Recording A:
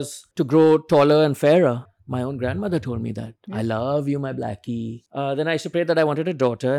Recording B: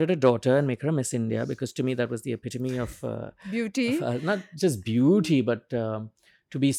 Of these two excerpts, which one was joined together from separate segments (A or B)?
A